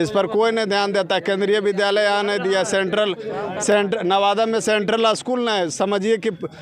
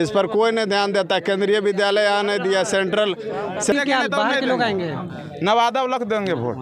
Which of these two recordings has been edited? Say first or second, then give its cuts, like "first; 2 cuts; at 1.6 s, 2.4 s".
second; 1 cut; at 3.7 s